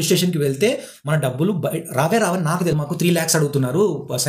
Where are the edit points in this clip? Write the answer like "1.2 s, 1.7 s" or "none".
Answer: 2.8 s